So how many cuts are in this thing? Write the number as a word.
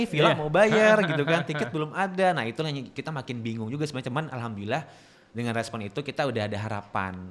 zero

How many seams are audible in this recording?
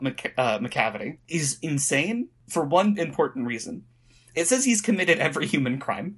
two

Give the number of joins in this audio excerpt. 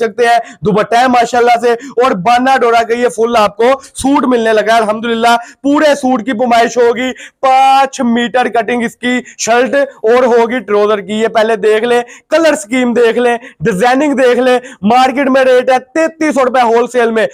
zero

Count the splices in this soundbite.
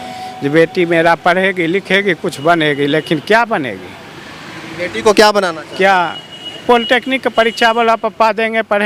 zero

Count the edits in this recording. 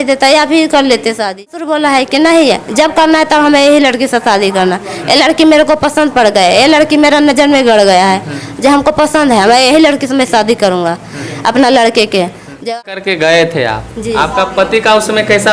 two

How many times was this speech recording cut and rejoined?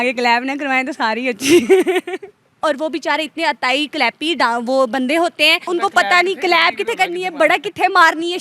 two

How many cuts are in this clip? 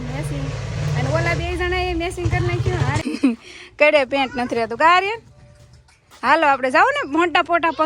one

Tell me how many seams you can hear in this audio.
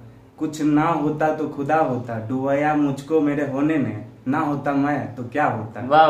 zero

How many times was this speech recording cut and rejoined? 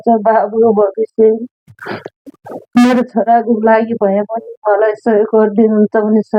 zero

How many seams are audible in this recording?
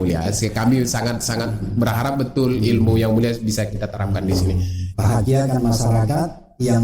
one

